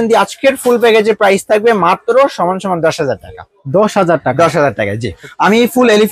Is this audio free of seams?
no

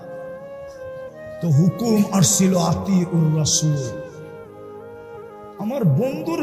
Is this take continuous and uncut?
yes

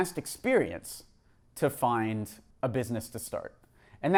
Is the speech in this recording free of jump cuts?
yes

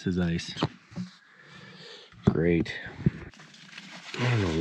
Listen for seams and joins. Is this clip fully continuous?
yes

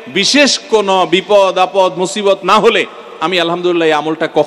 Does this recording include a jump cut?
no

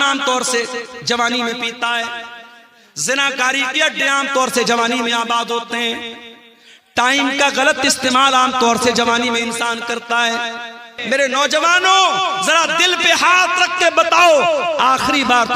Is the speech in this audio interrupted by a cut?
yes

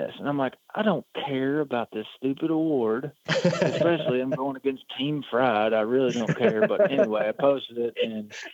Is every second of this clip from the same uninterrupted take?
yes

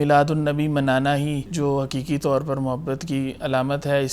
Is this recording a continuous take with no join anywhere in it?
no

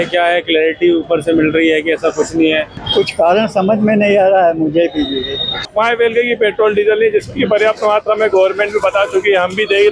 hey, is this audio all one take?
no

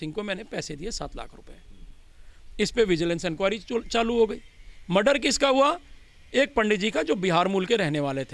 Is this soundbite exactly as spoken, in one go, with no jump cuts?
yes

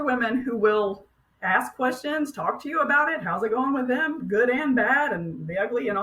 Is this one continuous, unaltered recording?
yes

